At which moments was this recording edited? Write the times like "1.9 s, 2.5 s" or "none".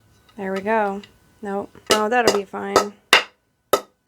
1.9 s